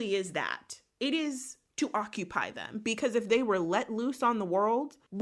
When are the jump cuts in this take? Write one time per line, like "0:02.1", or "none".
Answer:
none